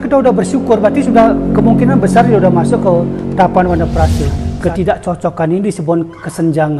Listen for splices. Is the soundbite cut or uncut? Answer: cut